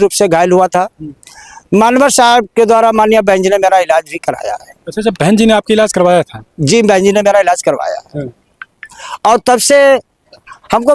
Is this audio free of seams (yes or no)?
yes